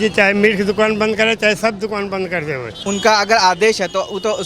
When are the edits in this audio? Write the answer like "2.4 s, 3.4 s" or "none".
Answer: 2.9 s